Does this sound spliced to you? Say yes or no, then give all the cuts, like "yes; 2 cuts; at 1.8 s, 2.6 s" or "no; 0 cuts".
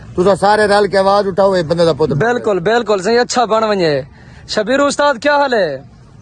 no; 0 cuts